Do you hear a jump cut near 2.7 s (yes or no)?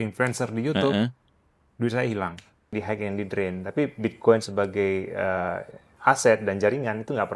yes